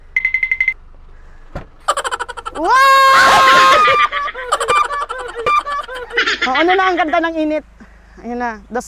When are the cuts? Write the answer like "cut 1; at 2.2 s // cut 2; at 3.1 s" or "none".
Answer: cut 1; at 6.3 s